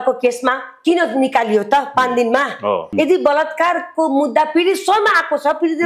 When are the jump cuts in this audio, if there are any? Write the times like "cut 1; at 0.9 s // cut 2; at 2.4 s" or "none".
cut 1; at 2.9 s